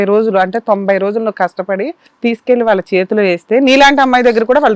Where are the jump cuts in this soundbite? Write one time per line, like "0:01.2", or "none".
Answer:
0:02.0